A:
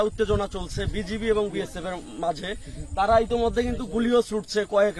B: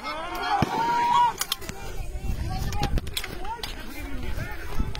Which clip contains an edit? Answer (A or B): B